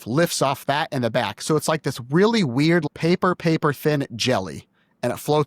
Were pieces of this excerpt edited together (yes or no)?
yes